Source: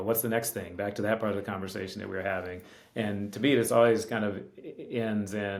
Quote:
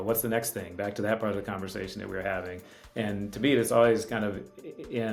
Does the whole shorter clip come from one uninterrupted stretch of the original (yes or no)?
yes